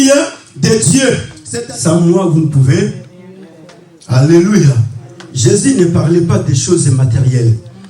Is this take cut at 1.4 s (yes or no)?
yes